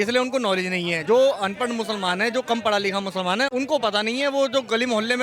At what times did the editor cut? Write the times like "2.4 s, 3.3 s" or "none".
1.0 s, 3.5 s